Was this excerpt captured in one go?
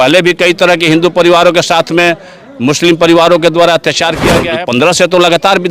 no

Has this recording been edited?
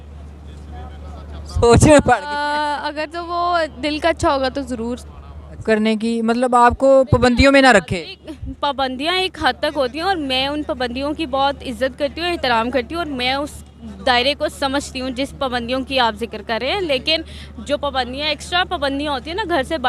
yes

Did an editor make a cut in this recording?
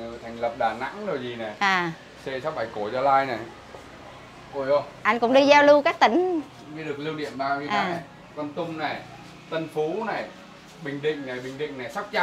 no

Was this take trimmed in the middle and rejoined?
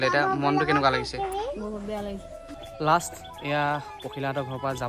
yes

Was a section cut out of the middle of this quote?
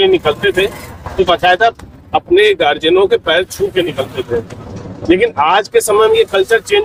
no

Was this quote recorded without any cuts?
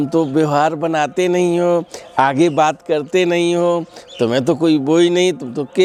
yes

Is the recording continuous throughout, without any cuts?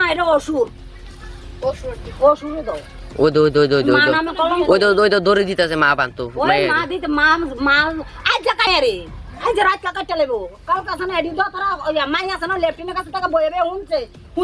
no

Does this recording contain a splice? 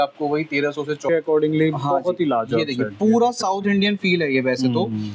yes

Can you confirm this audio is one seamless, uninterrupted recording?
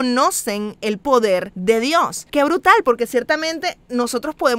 yes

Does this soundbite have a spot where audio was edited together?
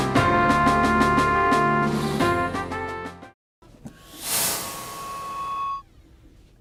no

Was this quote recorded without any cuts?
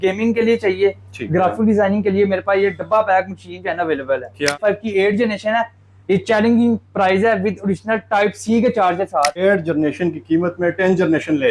no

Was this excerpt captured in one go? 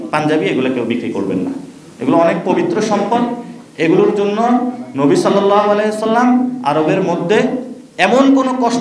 yes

